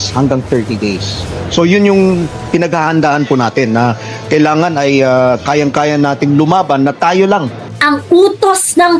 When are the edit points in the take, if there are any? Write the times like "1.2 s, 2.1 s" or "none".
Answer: 7.7 s